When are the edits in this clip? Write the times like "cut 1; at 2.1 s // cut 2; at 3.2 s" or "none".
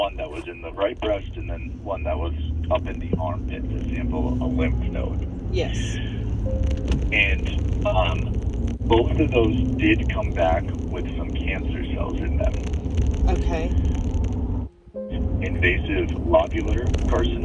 cut 1; at 14.9 s